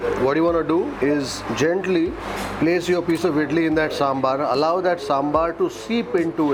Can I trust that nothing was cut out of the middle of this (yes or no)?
yes